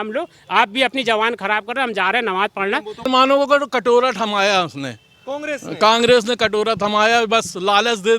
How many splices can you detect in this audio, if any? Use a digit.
1